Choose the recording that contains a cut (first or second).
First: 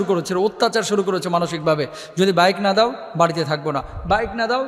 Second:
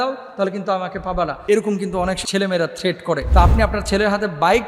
second